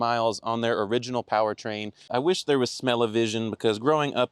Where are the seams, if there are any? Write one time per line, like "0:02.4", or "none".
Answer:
0:02.1